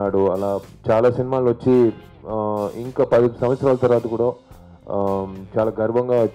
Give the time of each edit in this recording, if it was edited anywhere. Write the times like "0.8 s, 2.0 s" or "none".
none